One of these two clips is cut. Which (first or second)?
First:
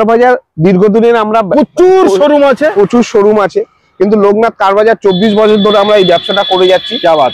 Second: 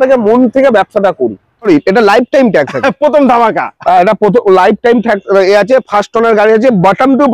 second